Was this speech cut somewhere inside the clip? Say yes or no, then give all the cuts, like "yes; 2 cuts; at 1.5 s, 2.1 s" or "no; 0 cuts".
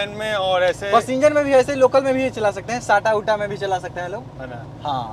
no; 0 cuts